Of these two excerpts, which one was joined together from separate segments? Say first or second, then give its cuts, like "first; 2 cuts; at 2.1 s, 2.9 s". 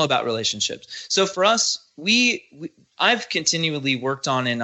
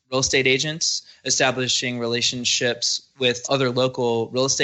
second; 1 cut; at 3.4 s